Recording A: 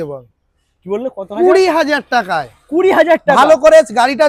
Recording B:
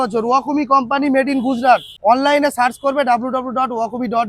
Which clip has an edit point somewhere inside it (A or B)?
B